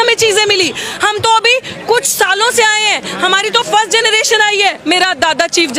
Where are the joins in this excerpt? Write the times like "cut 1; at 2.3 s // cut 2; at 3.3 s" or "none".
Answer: cut 1; at 4.8 s